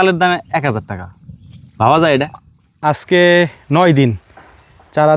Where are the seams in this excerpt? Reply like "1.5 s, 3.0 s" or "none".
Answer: 2.7 s